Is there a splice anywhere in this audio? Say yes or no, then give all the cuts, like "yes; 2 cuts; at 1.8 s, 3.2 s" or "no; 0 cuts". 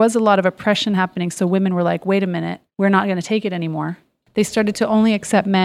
yes; 2 cuts; at 2.6 s, 4.2 s